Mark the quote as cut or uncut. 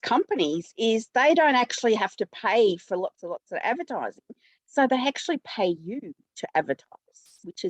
uncut